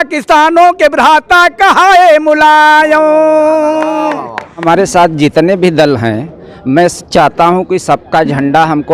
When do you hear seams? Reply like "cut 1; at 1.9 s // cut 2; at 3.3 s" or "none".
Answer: cut 1; at 4.6 s